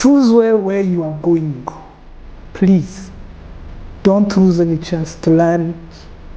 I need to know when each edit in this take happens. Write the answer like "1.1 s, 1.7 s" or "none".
2.4 s, 5.1 s